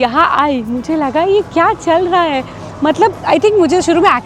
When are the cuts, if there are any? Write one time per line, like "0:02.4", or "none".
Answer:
none